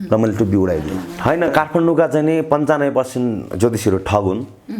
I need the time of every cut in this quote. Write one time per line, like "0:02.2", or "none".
0:01.0